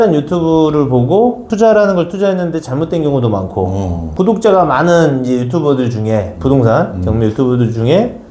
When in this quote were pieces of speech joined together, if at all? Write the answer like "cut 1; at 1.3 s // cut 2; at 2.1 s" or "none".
cut 1; at 1.5 s // cut 2; at 4.1 s